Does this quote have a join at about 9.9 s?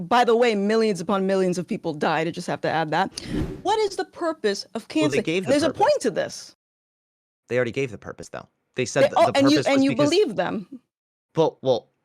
no; 1 cut; at 3.3 s

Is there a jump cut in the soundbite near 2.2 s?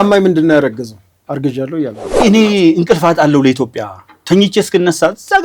yes; 1 cut; at 2.2 s

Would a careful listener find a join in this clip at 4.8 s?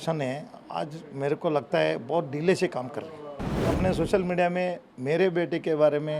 no; 1 cut; at 3.6 s

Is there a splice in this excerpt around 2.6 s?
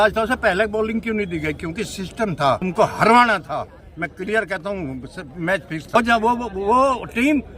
yes; 2 cuts; at 2.6 s, 5.9 s

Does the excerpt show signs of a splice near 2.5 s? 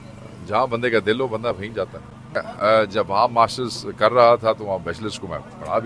yes; 1 cut; at 2.5 s

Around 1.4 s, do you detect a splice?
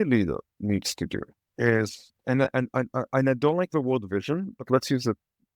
yes; 2 cuts; at 1.4 s, 2.1 s

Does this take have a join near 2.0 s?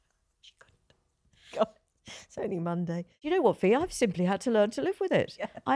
no; 1 cut; at 3.2 s

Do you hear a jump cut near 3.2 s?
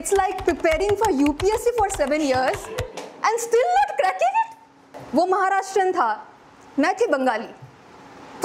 no; 1 cut; at 4.9 s

